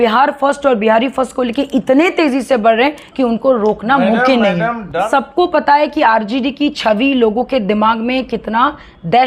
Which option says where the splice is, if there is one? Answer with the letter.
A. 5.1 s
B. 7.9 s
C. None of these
A